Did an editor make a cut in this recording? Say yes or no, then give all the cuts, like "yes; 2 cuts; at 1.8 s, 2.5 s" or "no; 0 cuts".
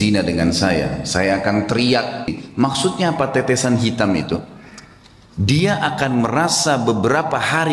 yes; 1 cut; at 2.4 s